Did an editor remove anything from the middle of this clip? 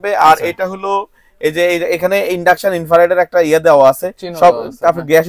no; 0 cuts

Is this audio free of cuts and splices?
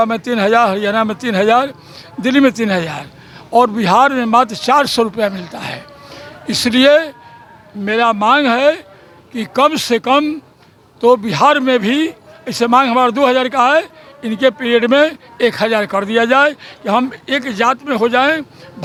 yes; 0 cuts

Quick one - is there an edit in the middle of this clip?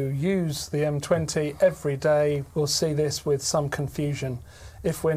yes; 1 cut; at 2.4 s

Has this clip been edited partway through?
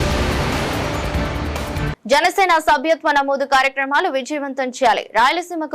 no; 0 cuts

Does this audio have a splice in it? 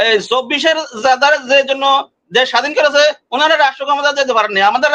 no; 0 cuts

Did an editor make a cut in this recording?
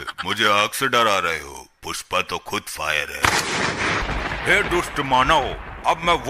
yes; 1 cut; at 4.0 s

